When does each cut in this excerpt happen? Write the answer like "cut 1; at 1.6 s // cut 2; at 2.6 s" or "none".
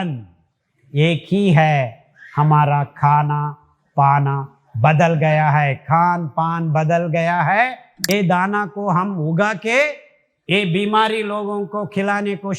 cut 1; at 7.9 s